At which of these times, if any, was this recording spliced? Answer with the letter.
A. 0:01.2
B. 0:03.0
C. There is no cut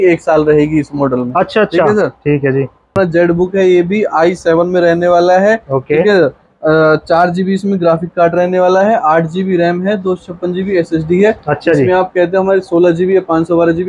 B